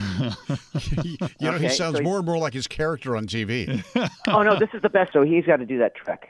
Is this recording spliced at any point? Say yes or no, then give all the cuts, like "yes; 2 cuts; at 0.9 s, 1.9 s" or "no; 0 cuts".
no; 0 cuts